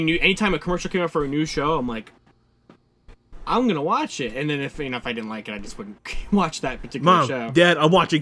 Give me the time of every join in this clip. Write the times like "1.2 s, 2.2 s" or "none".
7.0 s

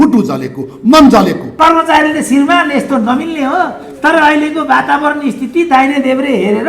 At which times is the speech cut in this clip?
1.5 s

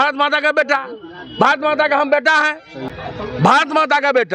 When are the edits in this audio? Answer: none

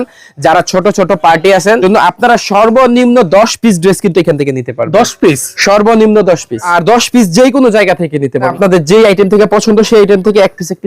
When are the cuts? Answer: 1.8 s, 6.7 s, 8.5 s

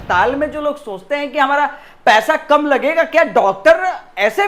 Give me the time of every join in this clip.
none

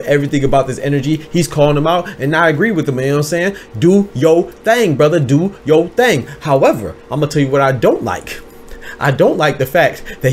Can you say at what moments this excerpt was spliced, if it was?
none

